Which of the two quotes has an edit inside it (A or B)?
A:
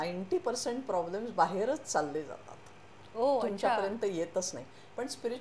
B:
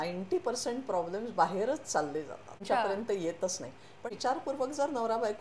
B